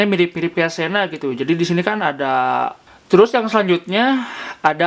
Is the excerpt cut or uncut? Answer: cut